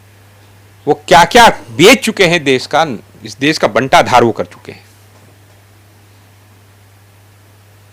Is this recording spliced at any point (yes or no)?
no